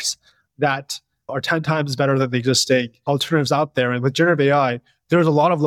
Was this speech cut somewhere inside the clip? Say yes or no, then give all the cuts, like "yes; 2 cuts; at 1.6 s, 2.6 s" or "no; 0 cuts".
yes; 1 cut; at 1.3 s